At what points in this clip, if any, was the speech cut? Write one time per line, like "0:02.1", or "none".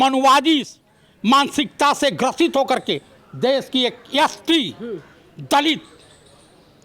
none